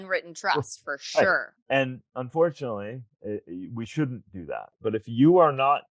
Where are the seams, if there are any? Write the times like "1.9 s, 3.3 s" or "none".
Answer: 1.8 s, 3.1 s, 4.8 s

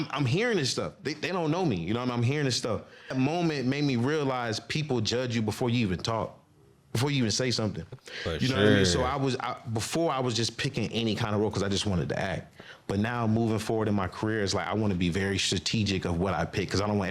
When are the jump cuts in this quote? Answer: 3.1 s

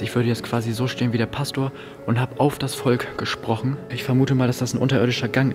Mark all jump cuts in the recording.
3.9 s

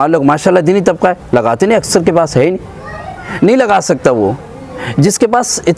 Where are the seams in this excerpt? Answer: none

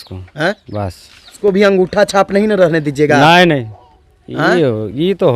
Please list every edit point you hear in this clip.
1.4 s

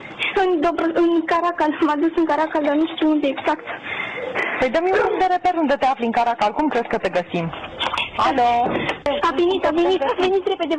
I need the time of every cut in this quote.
8.0 s, 9.0 s

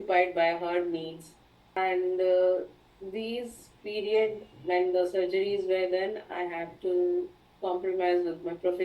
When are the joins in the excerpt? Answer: 1.8 s

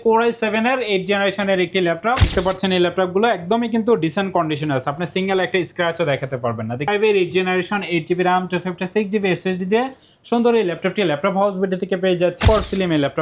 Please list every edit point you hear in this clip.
2.2 s, 6.9 s, 12.4 s

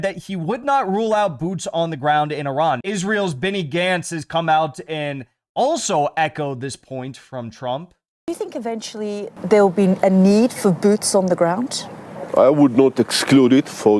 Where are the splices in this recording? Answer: 2.8 s

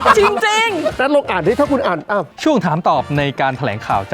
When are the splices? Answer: 1.0 s, 2.3 s

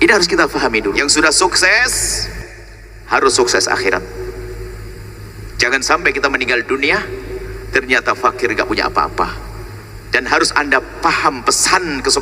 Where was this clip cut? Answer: 1.0 s

